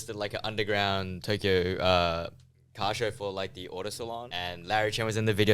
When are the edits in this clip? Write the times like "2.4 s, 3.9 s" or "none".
4.3 s